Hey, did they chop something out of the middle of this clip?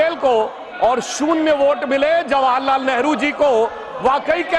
no; 0 cuts

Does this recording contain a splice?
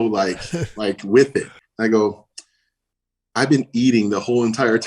yes; 1 cut; at 1.6 s

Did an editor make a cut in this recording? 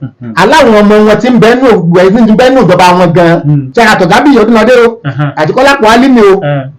yes; 1 cut; at 3.6 s

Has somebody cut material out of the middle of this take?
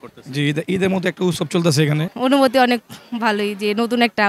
yes; 1 cut; at 2.1 s

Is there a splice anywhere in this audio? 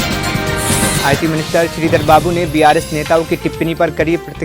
yes; 1 cut; at 1.0 s

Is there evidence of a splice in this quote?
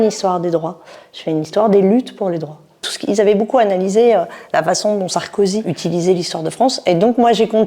yes; 1 cut; at 2.8 s

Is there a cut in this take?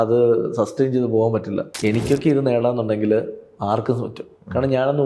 yes; 1 cut; at 1.7 s

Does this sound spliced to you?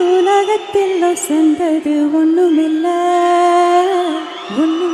no; 0 cuts

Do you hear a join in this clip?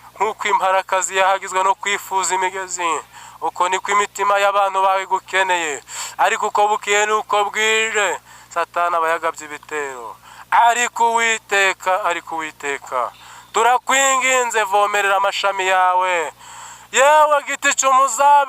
no; 0 cuts

